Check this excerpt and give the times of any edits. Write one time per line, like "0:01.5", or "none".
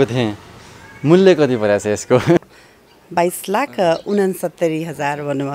0:02.5